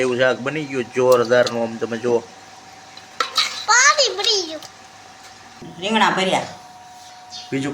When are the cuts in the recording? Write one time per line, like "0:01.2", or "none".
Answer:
0:05.7